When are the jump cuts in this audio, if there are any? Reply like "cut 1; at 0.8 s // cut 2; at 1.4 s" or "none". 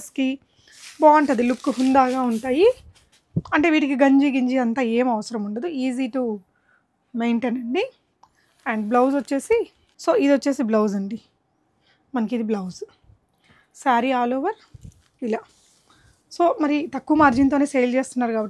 none

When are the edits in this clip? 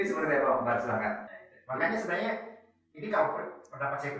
cut 1; at 1.3 s

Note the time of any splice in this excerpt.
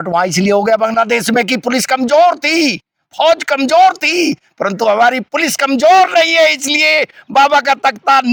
none

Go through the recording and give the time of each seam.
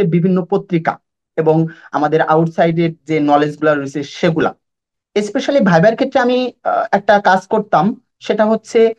none

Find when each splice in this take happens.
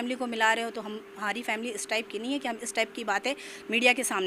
none

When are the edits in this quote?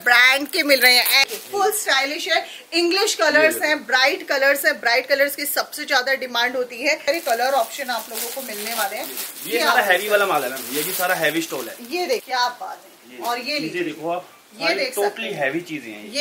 cut 1; at 1.2 s // cut 2; at 7.1 s // cut 3; at 12.2 s

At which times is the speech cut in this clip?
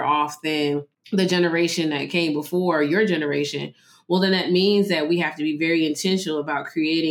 cut 1; at 0.9 s

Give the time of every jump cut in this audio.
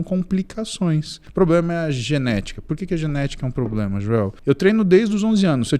cut 1; at 1.2 s // cut 2; at 4.4 s

